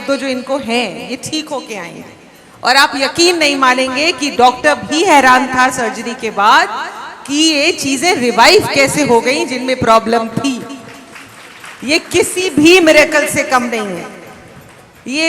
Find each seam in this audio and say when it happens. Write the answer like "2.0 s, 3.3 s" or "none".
10.4 s